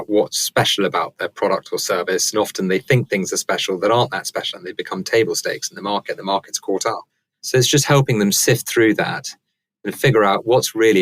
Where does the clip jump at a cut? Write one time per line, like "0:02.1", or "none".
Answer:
0:07.0